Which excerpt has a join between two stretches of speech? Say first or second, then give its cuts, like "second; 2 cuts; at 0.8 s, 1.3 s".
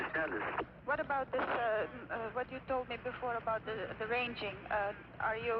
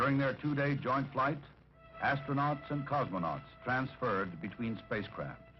second; 1 cut; at 4.4 s